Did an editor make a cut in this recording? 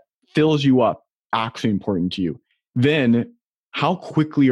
yes; 1 cut; at 2.4 s

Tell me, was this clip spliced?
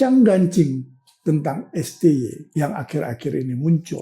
yes; 1 cut; at 2.4 s

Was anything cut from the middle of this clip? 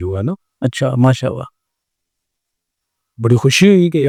no; 0 cuts

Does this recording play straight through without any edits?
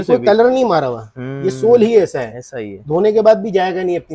yes; 0 cuts

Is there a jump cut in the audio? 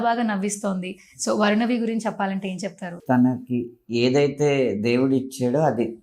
yes; 1 cut; at 2.9 s

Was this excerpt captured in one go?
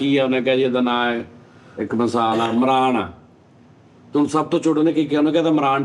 yes; 0 cuts

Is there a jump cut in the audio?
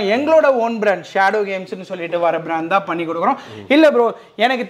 no; 0 cuts

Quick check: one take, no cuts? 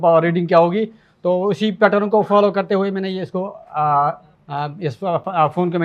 no; 1 cut; at 4.3 s

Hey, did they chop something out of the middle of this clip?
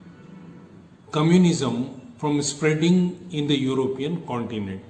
no; 0 cuts

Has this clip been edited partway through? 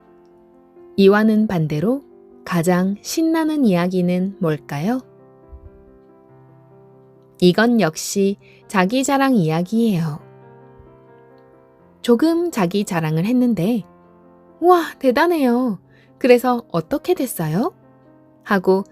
yes; 1 cut; at 1.0 s

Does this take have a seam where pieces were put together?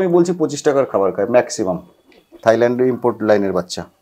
yes; 1 cut; at 2.4 s

